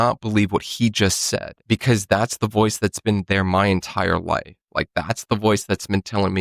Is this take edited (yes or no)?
yes